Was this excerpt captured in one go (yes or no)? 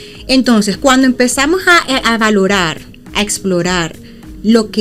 yes